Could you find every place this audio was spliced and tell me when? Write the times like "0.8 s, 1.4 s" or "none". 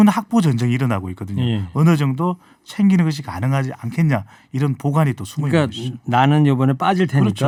none